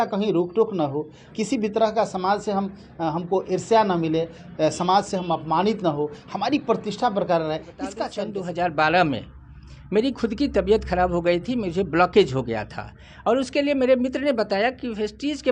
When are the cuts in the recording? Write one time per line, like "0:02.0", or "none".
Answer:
0:08.1